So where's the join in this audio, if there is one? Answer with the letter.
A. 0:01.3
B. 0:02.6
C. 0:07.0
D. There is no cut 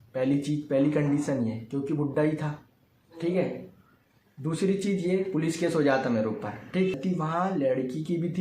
C